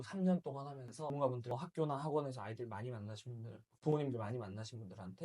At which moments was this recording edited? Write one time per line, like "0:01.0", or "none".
0:01.1